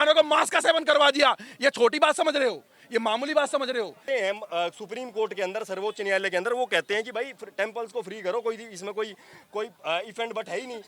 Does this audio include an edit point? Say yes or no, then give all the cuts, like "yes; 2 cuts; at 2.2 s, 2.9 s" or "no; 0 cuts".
yes; 1 cut; at 4.0 s